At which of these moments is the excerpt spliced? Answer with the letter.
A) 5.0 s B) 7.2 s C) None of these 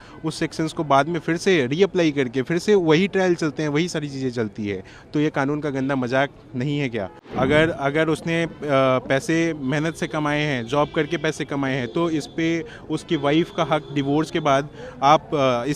B